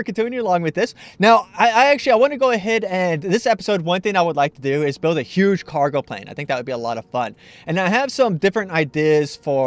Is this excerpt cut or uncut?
cut